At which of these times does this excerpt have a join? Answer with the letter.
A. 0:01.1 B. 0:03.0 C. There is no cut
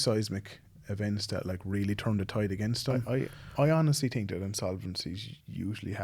B